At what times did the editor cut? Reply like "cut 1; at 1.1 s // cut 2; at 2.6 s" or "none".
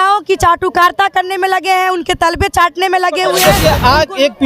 cut 1; at 3.4 s